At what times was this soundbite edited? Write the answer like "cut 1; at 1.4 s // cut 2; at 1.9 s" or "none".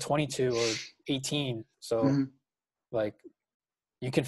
cut 1; at 1.7 s